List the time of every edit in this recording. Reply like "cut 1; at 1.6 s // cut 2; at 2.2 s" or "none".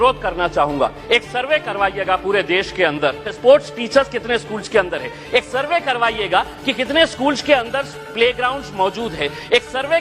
cut 1; at 3.3 s